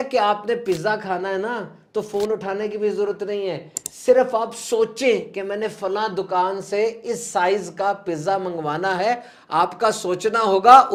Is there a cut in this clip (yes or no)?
no